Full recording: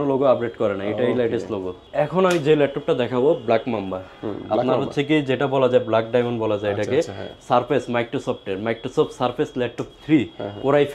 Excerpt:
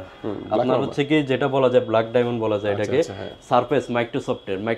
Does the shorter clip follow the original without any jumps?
yes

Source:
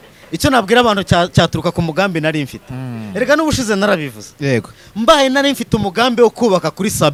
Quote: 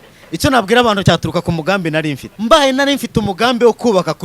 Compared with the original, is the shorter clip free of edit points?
no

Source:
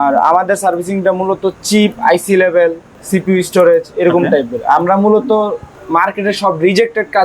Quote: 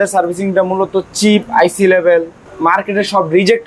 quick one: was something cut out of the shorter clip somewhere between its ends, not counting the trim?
yes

